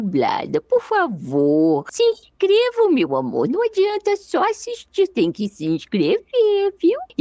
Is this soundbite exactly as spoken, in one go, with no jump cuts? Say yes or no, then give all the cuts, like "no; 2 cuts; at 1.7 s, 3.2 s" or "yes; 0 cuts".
yes; 0 cuts